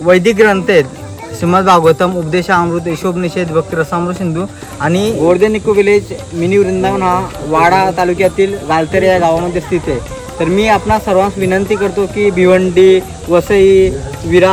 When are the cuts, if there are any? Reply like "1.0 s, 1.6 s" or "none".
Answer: 5.2 s